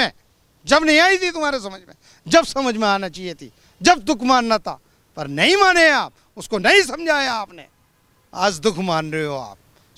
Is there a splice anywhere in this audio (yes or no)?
no